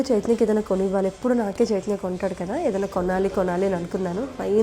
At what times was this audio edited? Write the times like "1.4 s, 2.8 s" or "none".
none